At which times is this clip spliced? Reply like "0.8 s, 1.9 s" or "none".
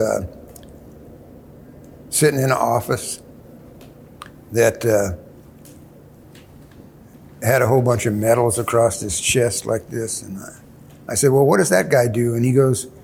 none

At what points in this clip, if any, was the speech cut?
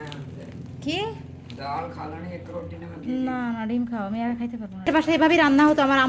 4.9 s

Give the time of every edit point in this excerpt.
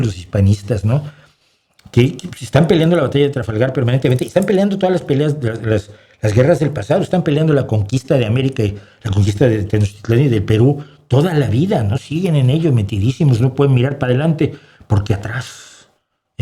none

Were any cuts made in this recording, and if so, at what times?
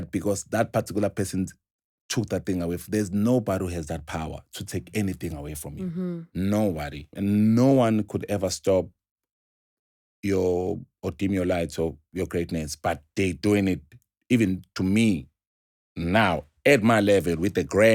7.1 s

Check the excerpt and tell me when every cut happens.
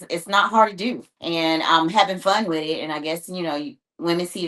1.1 s

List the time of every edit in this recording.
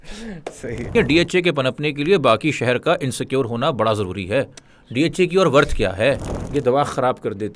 0.9 s, 6.3 s

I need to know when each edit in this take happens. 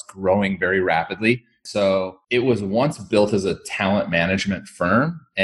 1.8 s

